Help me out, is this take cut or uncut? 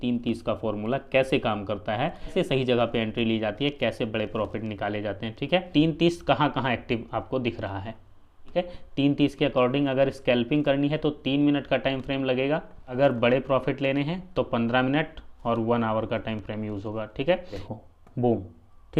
cut